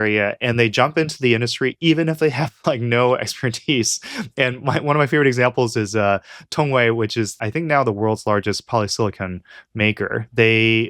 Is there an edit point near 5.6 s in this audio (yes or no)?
no